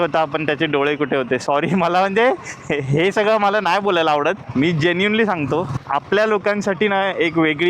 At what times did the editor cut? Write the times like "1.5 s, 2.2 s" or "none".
4.6 s